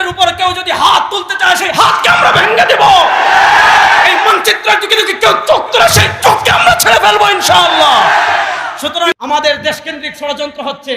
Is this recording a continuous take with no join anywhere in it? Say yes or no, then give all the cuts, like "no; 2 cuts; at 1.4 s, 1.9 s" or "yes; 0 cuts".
no; 1 cut; at 9.1 s